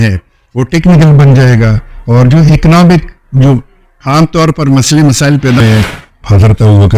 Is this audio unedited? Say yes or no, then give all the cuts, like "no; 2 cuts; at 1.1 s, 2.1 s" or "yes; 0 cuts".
no; 1 cut; at 5.6 s